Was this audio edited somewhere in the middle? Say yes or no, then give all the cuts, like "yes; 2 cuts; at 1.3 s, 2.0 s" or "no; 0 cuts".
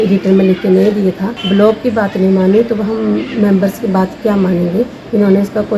yes; 1 cut; at 1.3 s